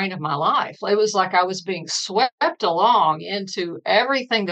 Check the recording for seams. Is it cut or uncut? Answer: uncut